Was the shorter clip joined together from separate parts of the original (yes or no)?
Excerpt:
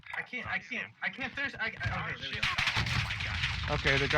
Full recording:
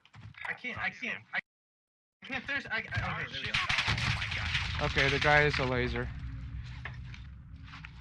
yes